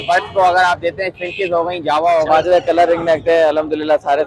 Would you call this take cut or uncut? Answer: cut